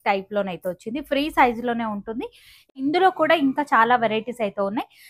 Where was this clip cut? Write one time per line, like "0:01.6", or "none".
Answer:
0:02.7